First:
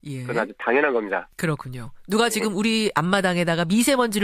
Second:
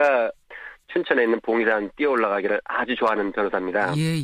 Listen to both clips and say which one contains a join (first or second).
first